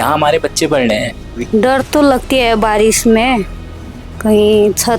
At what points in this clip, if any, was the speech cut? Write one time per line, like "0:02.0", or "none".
0:01.4